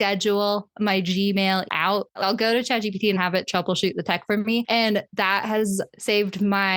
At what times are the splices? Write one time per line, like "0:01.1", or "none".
0:01.9
0:03.2